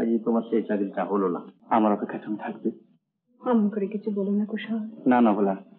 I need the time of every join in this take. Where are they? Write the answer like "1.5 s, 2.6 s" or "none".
1.5 s